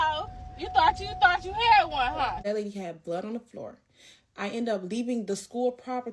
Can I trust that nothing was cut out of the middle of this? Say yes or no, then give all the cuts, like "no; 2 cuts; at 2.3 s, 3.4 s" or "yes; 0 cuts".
no; 1 cut; at 2.4 s